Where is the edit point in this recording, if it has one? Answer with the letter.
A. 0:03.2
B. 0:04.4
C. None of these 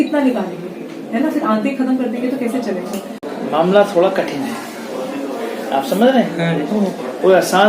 A